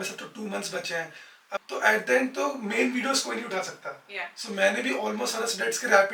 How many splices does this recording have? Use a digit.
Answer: 1